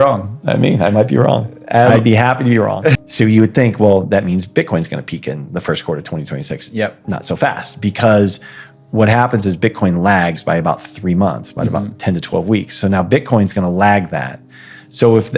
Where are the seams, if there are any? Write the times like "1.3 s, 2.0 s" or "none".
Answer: 3.0 s